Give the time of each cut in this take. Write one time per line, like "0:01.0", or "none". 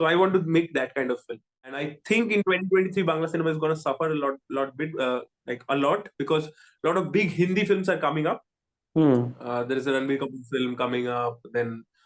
0:01.5